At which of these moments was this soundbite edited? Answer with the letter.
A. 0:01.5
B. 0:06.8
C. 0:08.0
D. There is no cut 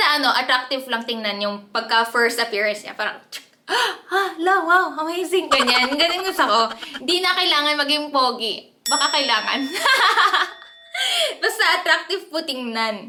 D